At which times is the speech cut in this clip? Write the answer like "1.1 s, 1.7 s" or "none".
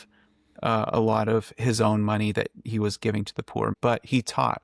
3.7 s